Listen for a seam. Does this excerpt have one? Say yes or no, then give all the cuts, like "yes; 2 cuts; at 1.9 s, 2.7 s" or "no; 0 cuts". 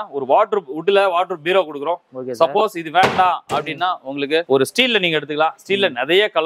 no; 0 cuts